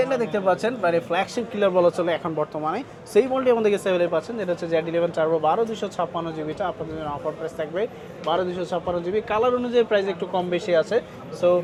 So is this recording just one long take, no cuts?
yes; 0 cuts

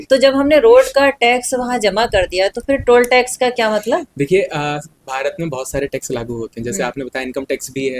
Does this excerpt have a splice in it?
no; 0 cuts

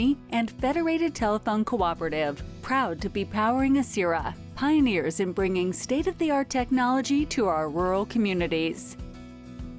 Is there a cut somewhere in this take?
yes; 1 cut; at 8.8 s

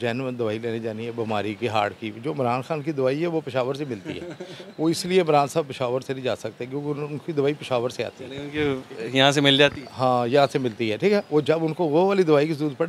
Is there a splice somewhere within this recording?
no; 0 cuts

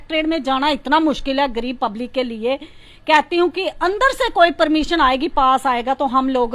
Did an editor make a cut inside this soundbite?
no; 0 cuts

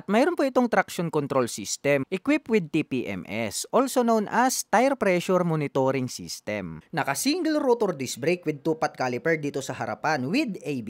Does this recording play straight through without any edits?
no; 2 cuts; at 2.0 s, 6.7 s

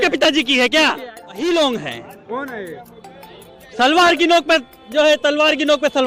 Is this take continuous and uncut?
no; 1 cut; at 1.3 s

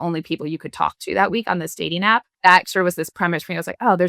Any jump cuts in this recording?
yes; 1 cut; at 2.3 s

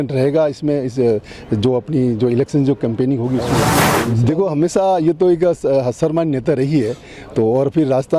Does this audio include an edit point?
yes; 1 cut; at 3.8 s

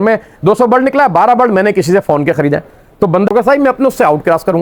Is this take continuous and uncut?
no; 1 cut; at 3.3 s

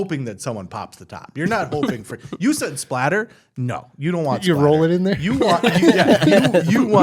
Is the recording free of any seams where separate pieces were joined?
yes; 0 cuts

